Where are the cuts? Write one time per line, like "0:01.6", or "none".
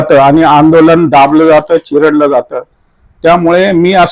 none